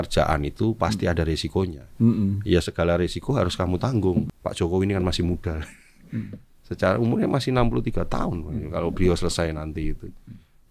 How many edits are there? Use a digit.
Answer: 1